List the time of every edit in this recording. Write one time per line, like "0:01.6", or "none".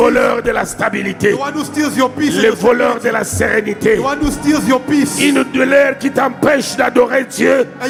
none